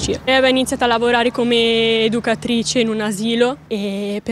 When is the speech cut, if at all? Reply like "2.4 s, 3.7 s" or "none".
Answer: none